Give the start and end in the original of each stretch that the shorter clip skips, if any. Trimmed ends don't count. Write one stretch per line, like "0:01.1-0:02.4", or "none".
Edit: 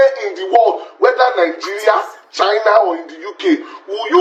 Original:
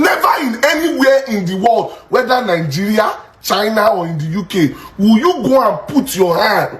none

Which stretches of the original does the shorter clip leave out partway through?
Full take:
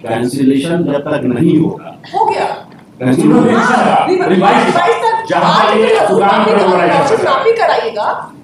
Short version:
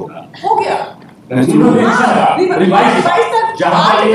none

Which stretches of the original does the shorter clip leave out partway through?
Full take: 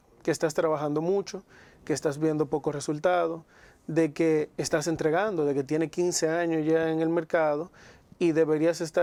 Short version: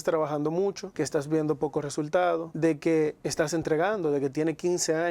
0:01.4-0:01.8
0:03.4-0:03.8

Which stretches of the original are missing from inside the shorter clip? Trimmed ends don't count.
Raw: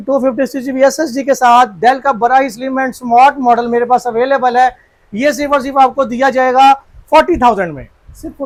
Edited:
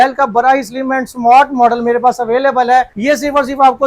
0:04.8-0:05.1

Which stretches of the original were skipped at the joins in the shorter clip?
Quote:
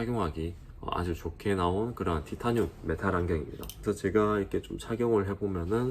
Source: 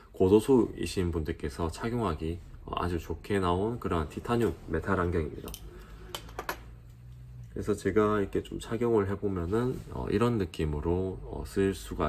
0:05.5-0:07.5

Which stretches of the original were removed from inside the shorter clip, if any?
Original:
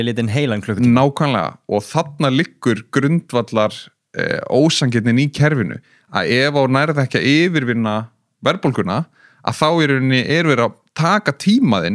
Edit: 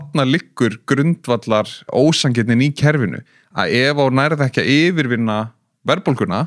0:03.9-0:04.4

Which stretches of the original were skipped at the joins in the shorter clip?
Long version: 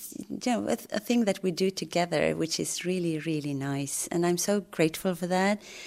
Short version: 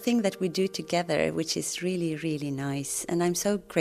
none

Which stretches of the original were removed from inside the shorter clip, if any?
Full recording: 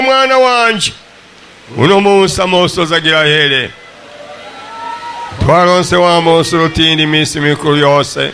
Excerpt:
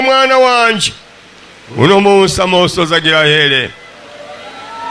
none

